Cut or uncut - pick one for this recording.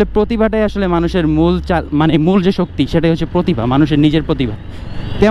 uncut